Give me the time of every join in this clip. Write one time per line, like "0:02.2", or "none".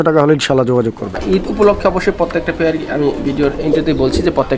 0:01.2